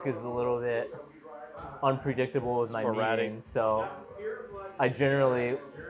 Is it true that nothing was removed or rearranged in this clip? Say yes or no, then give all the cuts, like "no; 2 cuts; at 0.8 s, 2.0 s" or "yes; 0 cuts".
yes; 0 cuts